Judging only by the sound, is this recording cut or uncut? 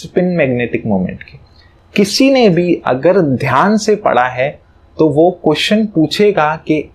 uncut